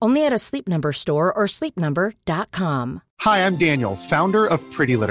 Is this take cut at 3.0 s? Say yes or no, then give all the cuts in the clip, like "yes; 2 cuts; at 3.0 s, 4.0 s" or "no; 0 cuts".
yes; 1 cut; at 3.0 s